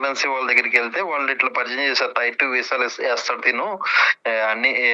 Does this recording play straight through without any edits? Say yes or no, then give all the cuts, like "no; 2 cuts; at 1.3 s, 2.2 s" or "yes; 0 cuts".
yes; 0 cuts